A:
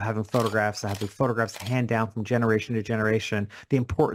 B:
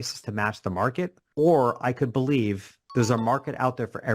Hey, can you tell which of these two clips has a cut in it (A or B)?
B